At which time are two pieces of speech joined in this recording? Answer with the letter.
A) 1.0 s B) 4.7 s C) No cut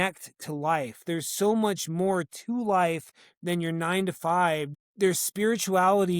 B